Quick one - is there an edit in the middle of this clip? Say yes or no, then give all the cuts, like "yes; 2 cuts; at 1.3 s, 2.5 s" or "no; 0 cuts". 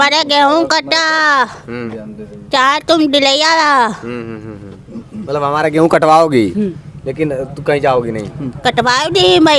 no; 0 cuts